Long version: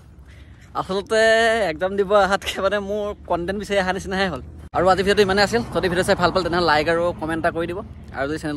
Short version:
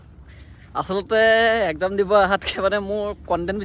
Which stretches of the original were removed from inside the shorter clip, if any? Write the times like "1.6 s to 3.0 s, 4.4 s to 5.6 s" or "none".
none